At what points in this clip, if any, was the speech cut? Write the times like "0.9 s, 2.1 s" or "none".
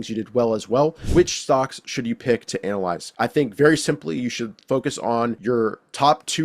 1.0 s, 3.1 s, 5.4 s